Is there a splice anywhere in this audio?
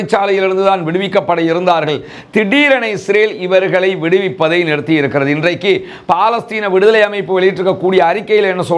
no; 0 cuts

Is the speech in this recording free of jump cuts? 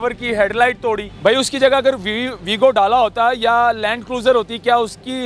no; 1 cut; at 1.1 s

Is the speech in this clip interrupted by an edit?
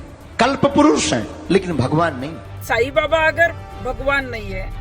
yes; 1 cut; at 2.5 s

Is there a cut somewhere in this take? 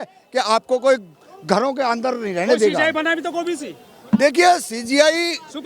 no; 0 cuts

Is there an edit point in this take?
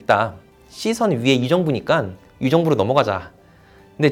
no; 0 cuts

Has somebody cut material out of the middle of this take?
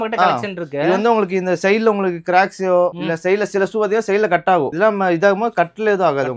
no; 0 cuts

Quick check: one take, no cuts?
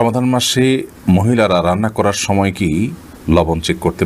yes; 0 cuts

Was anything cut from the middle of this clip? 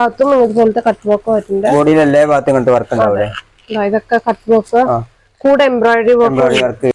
no; 0 cuts

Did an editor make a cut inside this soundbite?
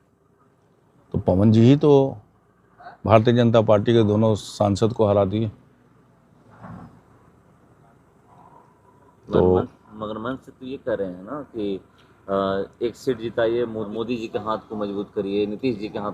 no; 0 cuts

